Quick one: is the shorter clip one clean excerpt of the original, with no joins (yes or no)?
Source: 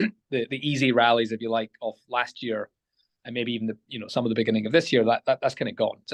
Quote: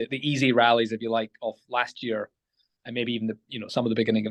yes